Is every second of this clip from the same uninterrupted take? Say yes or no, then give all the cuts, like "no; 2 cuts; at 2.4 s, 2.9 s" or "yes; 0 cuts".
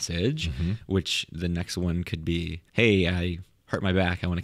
no; 1 cut; at 2.6 s